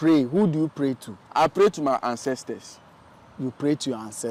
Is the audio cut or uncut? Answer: uncut